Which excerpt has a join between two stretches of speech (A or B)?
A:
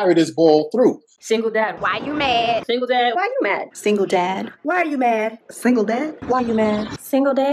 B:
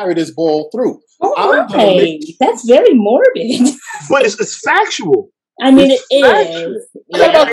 A